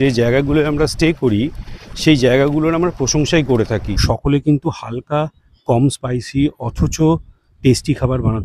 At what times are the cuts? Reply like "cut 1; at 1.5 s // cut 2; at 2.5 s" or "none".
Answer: cut 1; at 3.9 s